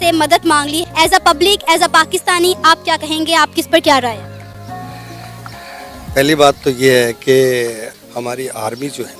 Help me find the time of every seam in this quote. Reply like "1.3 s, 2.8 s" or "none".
none